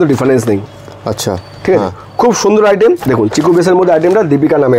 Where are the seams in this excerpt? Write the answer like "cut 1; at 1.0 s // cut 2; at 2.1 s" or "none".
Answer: cut 1; at 3.0 s